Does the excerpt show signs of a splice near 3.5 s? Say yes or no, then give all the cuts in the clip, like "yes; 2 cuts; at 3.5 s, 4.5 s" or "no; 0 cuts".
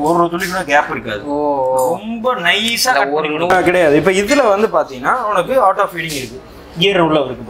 yes; 1 cut; at 3.5 s